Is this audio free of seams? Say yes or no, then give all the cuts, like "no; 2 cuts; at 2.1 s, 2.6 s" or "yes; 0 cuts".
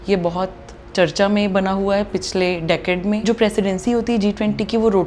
no; 1 cut; at 3.2 s